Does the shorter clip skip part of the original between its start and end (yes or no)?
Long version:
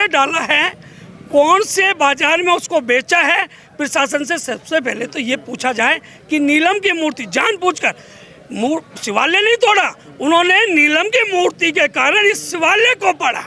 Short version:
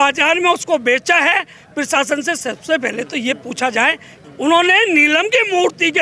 yes